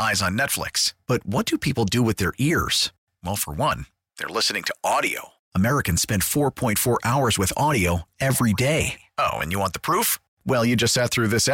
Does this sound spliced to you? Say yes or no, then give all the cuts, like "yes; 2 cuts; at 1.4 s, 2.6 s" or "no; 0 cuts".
no; 0 cuts